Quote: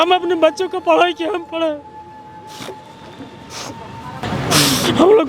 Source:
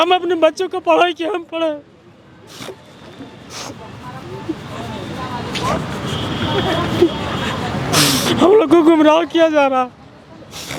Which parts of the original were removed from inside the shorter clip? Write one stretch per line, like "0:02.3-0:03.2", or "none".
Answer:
0:04.2-0:07.6